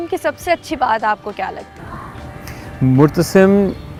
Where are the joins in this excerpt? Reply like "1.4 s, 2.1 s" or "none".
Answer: none